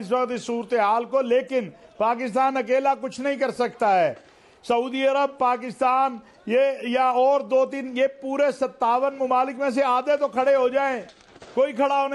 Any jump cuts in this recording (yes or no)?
no